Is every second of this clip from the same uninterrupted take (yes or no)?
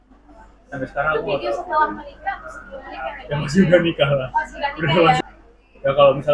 no